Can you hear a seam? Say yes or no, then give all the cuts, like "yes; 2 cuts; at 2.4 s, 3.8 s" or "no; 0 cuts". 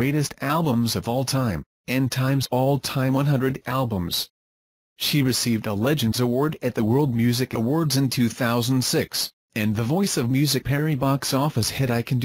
no; 0 cuts